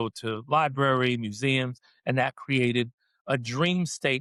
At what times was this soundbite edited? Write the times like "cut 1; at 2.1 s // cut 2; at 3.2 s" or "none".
none